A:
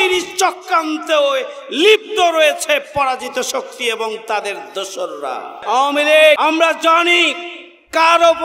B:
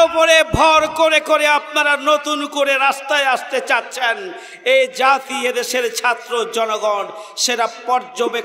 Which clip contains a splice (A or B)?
A